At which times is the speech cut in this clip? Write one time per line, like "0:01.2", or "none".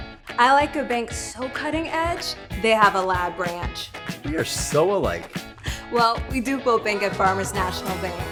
none